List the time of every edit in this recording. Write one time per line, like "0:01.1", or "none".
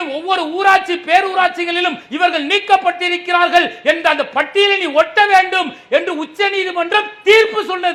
none